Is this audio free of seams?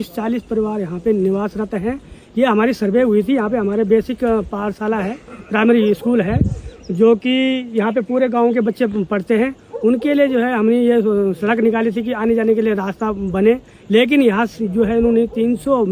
yes; 0 cuts

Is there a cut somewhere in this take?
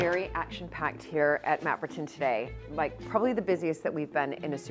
no; 0 cuts

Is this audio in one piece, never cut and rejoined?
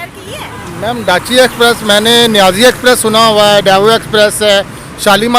yes; 0 cuts

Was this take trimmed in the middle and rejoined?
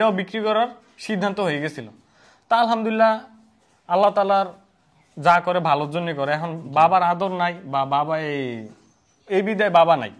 no; 0 cuts

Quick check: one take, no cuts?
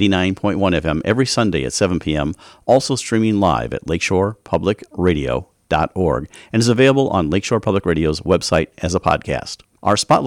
yes; 0 cuts

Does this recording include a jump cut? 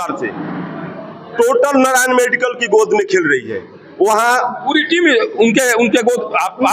no; 0 cuts

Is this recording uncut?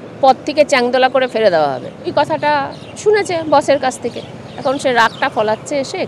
no; 1 cut; at 2.1 s

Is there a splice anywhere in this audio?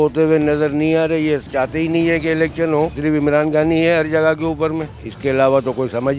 yes; 3 cuts; at 1.5 s, 3.0 s, 5.0 s

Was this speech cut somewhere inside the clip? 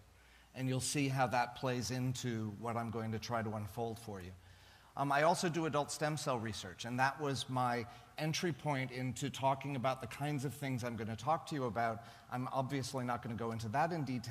yes; 1 cut; at 5.9 s

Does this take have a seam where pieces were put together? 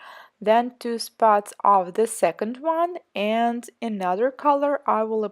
yes; 1 cut; at 1.3 s

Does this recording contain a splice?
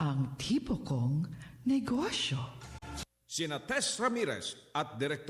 yes; 1 cut; at 3.0 s

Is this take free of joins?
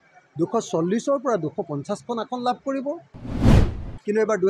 no; 1 cut; at 3.4 s

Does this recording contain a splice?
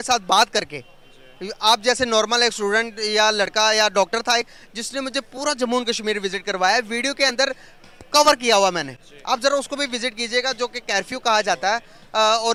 no; 0 cuts

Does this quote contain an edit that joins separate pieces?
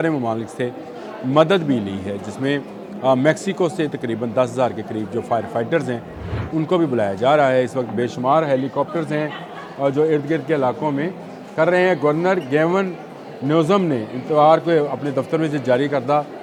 no; 0 cuts

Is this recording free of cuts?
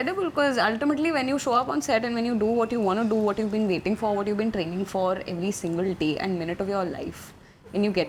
yes; 0 cuts

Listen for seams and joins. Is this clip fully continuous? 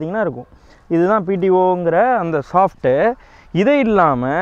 yes; 0 cuts

